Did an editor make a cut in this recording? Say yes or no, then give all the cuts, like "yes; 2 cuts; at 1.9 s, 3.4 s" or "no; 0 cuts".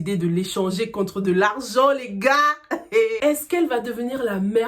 yes; 1 cut; at 3.2 s